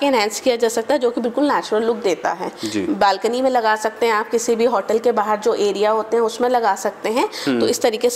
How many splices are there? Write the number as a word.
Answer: zero